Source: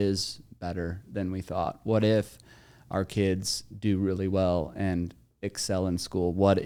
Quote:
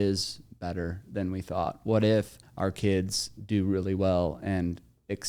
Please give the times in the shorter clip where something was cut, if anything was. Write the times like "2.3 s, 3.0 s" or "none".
2.4 s